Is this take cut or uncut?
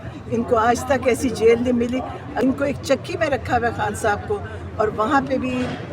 cut